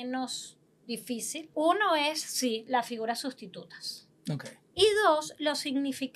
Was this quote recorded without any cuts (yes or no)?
no